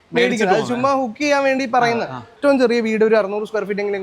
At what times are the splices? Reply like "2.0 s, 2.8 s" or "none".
2.3 s

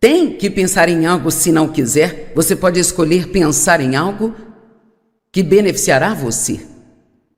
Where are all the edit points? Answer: 6.0 s

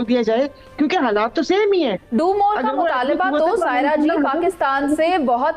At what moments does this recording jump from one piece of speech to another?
none

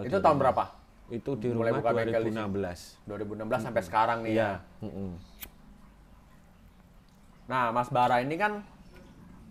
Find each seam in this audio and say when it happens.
none

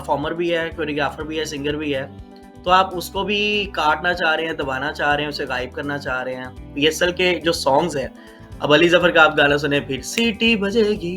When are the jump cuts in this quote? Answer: 6.7 s

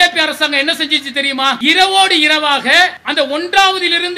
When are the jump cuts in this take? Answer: 1.6 s, 3.0 s

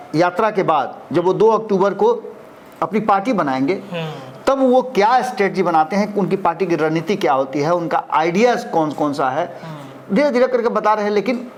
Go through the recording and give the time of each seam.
none

